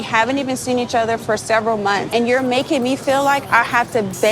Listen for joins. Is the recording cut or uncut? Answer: cut